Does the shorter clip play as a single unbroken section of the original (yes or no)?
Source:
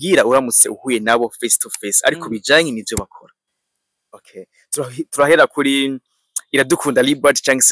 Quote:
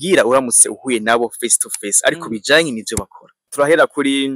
no